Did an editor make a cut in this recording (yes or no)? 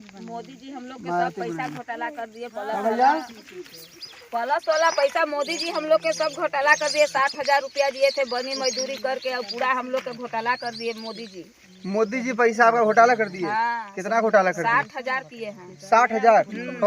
no